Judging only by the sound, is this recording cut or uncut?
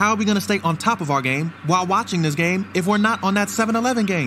uncut